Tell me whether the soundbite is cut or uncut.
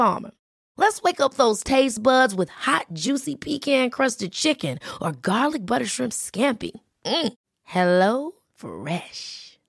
uncut